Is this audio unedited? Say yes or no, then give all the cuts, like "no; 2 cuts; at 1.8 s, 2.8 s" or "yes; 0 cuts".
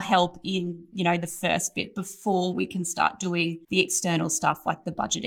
yes; 0 cuts